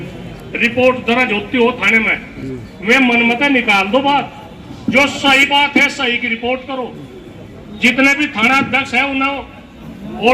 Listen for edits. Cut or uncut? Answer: uncut